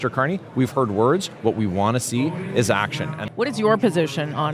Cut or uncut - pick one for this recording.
cut